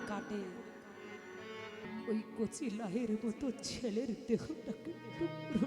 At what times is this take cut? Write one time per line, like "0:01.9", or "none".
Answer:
0:01.9